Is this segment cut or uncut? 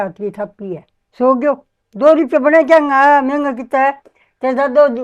cut